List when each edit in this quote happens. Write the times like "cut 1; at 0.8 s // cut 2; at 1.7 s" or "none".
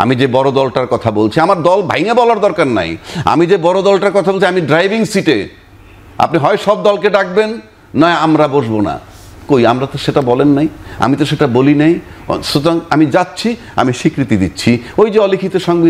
none